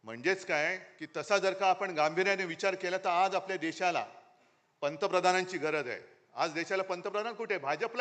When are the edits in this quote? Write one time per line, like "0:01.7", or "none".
0:00.9